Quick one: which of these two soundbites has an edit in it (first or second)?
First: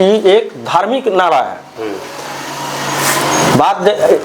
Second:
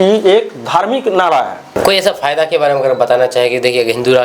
second